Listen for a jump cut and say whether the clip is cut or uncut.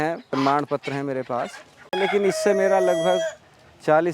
cut